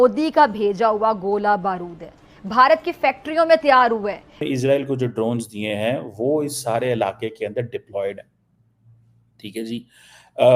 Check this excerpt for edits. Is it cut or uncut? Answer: cut